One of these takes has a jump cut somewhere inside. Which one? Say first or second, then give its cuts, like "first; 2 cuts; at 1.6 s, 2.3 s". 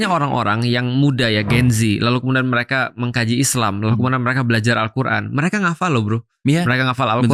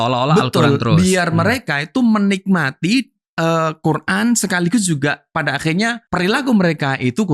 second; 1 cut; at 6.0 s